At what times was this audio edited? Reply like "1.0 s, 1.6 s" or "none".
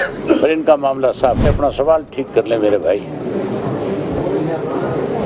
1.5 s